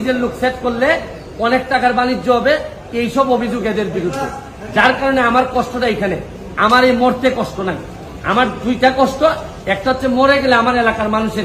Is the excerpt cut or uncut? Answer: uncut